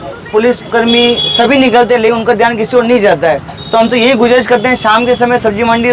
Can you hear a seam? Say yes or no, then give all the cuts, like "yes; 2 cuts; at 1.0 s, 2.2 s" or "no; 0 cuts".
no; 0 cuts